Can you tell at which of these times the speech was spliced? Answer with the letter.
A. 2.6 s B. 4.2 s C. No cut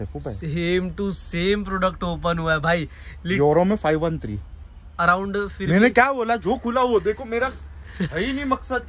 C